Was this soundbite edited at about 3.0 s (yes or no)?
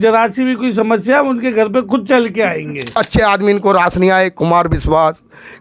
yes